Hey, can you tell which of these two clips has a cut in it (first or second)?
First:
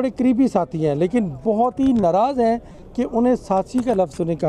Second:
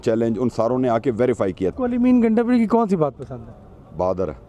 second